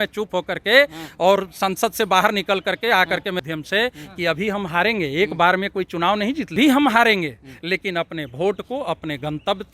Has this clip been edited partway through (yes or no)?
yes